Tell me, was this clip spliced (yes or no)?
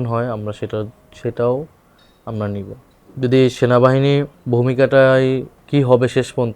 no